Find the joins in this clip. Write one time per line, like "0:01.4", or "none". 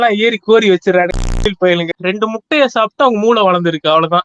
0:01.8